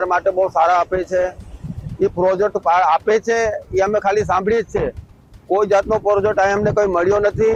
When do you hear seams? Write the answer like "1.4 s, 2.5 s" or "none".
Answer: none